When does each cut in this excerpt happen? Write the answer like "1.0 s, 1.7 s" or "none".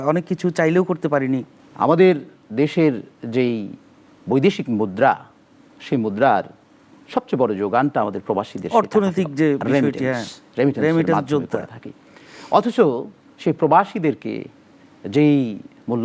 1.6 s